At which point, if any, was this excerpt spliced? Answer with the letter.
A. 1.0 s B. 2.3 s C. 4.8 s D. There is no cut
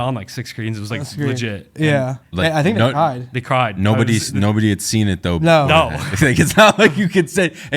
B